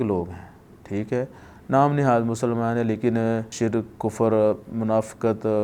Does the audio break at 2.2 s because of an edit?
no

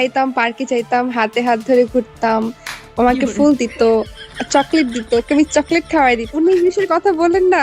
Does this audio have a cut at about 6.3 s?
yes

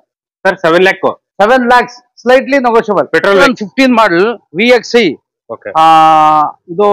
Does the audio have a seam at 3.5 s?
yes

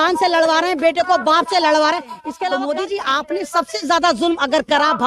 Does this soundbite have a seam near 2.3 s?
yes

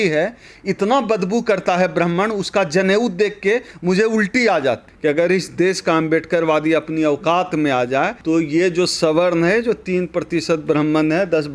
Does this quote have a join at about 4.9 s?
yes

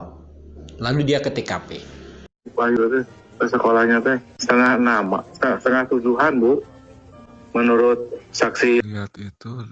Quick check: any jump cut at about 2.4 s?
yes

